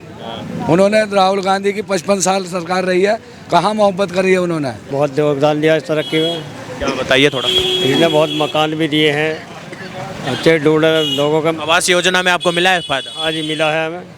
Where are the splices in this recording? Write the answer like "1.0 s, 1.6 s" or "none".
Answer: 4.8 s